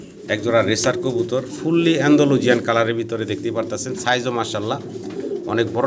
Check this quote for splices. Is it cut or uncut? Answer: uncut